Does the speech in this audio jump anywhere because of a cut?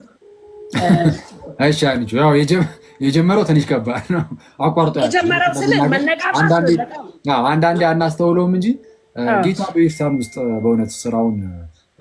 no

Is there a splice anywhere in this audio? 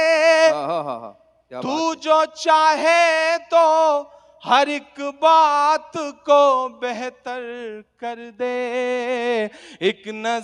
no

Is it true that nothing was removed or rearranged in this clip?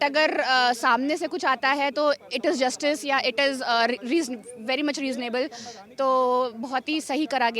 yes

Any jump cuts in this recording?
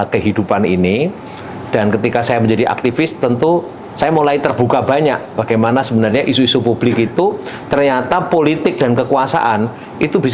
no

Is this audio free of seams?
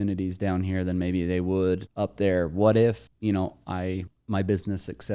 no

